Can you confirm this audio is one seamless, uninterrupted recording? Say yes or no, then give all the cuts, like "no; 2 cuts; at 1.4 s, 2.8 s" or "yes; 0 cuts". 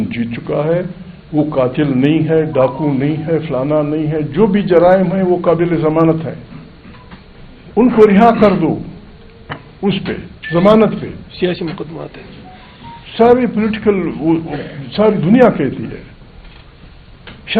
yes; 0 cuts